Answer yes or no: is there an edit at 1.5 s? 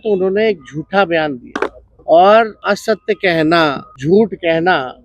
yes